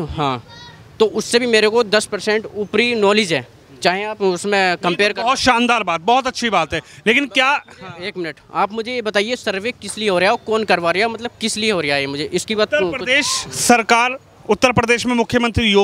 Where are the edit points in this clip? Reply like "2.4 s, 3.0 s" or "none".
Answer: none